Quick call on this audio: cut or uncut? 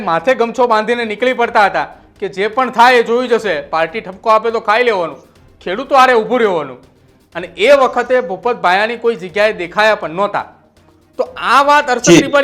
uncut